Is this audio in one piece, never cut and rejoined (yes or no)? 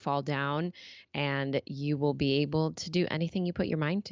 yes